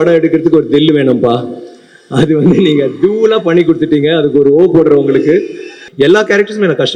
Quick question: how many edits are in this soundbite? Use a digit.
1